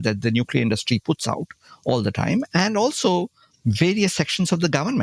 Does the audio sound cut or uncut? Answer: uncut